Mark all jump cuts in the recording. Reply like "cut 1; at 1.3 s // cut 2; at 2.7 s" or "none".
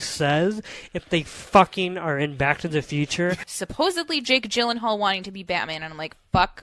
cut 1; at 3.5 s